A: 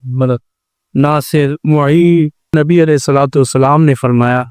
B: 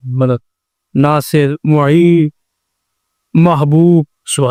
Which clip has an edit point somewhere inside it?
A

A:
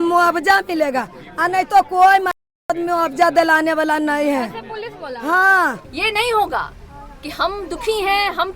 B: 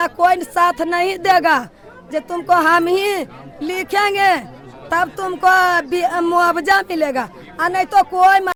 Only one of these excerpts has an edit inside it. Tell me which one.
A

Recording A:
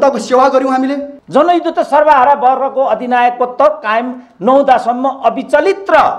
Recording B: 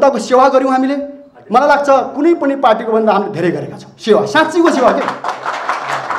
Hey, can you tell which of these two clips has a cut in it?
A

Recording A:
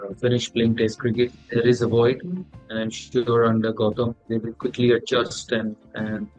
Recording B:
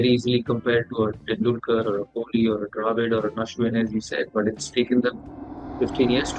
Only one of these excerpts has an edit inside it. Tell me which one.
A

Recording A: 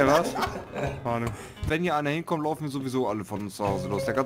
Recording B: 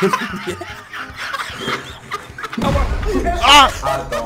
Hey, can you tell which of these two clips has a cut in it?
A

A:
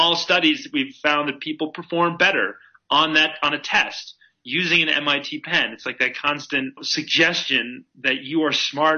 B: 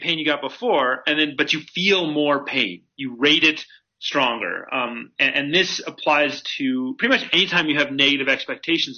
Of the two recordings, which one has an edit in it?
A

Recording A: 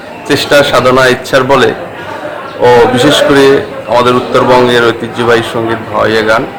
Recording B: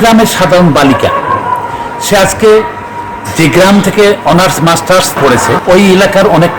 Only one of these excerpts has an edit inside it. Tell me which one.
B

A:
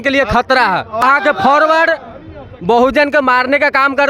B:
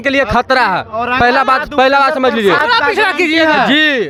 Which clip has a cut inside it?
A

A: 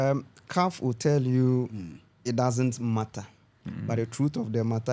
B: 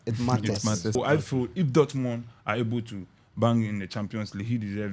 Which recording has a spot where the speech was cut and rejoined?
B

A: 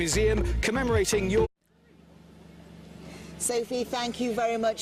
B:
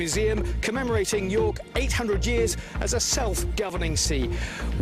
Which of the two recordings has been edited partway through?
B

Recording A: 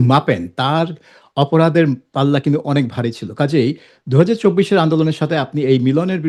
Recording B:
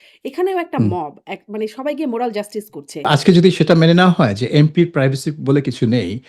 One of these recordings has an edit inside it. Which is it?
B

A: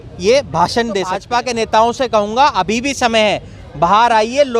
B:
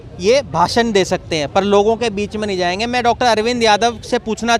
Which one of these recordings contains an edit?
A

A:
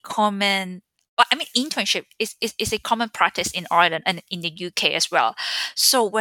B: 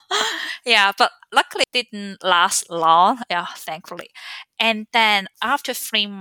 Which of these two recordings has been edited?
B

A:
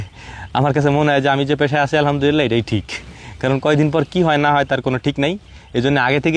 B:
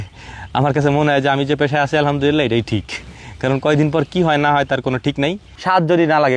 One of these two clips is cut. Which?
B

